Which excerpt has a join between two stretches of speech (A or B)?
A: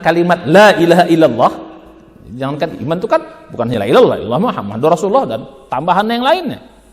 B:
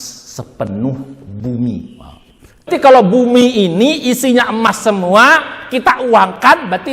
B